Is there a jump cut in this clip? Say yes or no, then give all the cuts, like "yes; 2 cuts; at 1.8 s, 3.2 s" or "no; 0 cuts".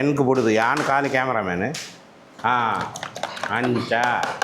yes; 1 cut; at 2.3 s